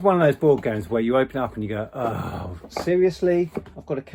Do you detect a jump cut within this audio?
no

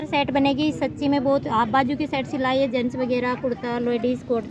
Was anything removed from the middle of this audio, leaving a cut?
no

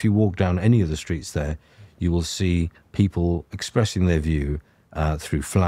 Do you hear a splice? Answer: no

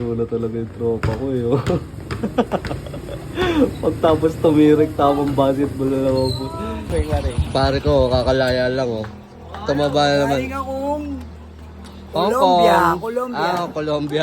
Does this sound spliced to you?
yes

